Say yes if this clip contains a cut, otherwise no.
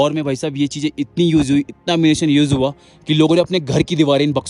no